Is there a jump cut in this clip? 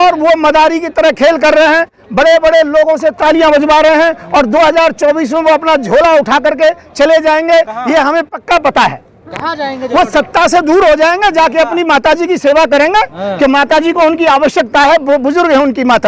no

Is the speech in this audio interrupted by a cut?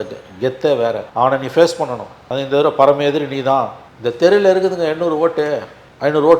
yes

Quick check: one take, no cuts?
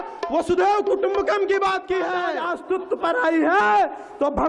no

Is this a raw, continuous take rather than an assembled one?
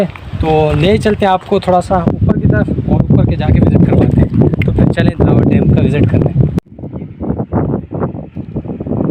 yes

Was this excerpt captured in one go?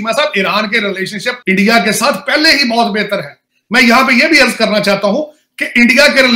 yes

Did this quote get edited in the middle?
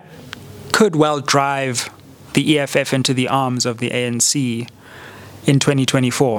no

